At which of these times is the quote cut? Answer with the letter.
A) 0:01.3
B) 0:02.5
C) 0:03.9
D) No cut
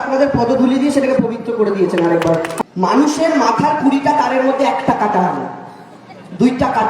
B